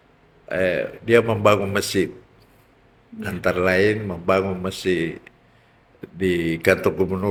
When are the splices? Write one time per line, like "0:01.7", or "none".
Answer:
none